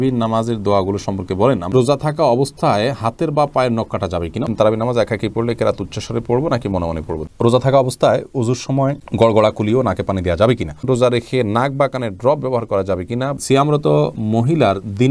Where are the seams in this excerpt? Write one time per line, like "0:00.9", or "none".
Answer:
0:01.7
0:04.5
0:07.2
0:10.8
0:13.4